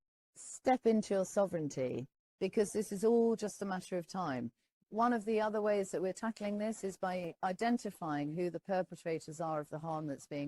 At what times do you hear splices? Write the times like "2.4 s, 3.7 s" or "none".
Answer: 4.7 s